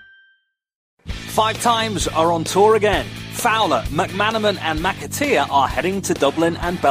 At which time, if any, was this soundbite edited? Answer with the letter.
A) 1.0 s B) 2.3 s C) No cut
A